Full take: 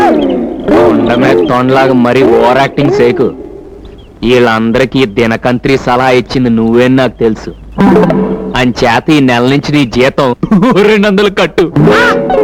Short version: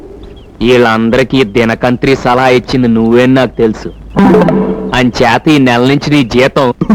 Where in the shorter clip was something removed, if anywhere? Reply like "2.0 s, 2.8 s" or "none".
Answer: none